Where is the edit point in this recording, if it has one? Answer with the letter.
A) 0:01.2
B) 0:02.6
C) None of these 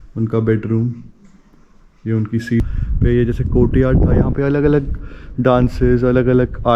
B